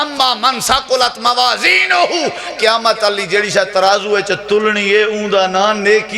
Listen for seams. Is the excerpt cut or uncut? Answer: uncut